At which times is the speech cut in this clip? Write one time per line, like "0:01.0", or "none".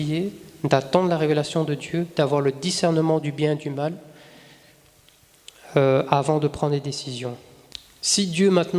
0:07.5